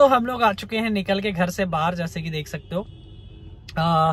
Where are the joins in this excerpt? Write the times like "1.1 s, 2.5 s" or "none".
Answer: none